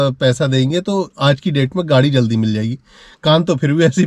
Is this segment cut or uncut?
uncut